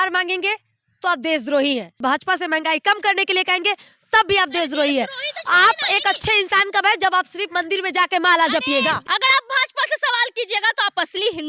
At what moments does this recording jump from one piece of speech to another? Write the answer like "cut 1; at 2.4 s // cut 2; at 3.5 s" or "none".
cut 1; at 2.0 s // cut 2; at 9.0 s